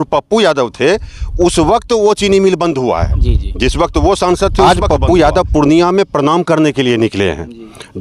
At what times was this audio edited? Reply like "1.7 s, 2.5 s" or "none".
4.6 s